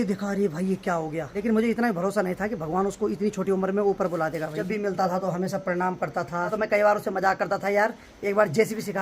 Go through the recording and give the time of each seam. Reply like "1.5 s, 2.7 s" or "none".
1.3 s, 4.5 s, 6.5 s